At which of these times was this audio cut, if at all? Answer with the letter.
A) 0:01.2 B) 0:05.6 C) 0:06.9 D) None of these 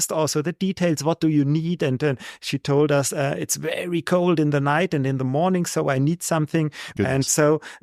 C